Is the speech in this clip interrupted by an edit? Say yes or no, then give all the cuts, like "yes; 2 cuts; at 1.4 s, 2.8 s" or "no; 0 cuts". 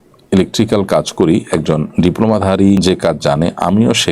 yes; 1 cut; at 2.8 s